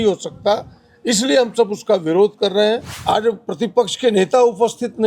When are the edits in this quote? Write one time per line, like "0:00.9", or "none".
0:02.9